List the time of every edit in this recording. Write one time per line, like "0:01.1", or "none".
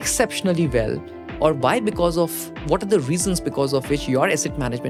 none